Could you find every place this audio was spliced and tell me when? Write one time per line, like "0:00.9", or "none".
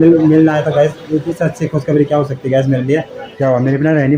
0:01.4
0:03.2